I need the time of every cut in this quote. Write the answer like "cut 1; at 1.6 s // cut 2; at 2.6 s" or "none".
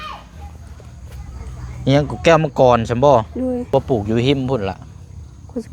cut 1; at 3.7 s

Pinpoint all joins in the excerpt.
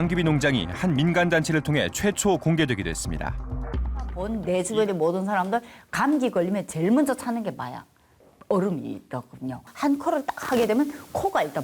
cut 1; at 4.2 s // cut 2; at 9.7 s

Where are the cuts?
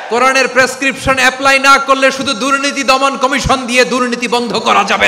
none

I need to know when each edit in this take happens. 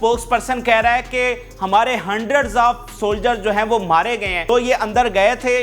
cut 1; at 4.5 s

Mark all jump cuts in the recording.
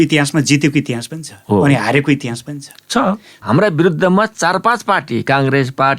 cut 1; at 3.4 s

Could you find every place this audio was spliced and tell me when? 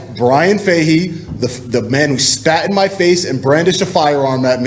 none

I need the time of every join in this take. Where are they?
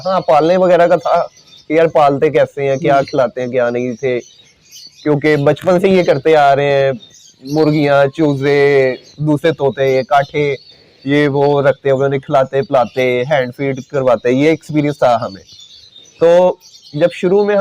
none

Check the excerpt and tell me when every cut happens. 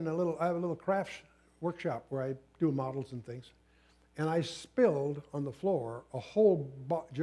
none

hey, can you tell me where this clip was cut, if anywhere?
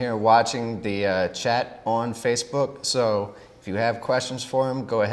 cut 1; at 3.0 s

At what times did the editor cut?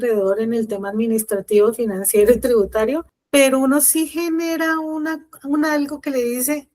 cut 1; at 3.1 s

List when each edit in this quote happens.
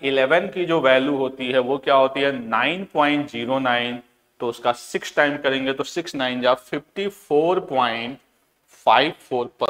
none

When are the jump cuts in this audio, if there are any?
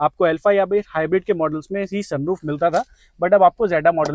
none

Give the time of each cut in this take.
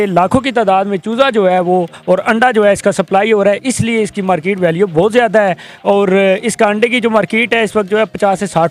none

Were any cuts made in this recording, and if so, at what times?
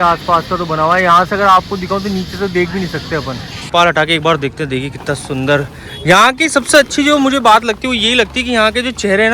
cut 1; at 3.7 s

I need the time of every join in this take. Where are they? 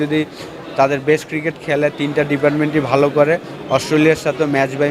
none

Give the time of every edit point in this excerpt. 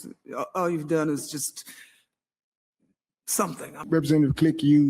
cut 1; at 3.8 s

